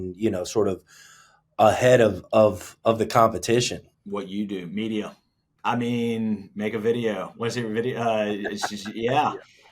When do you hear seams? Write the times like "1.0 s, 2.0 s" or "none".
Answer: 3.9 s